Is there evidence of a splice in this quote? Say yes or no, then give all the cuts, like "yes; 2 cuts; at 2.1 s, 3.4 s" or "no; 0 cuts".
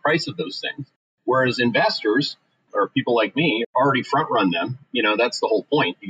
yes; 2 cuts; at 2.6 s, 3.7 s